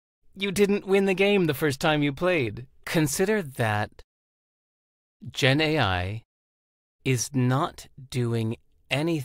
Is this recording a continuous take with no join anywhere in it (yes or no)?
no